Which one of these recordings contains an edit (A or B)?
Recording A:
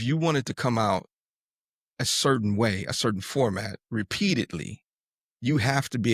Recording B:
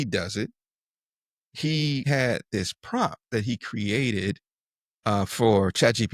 B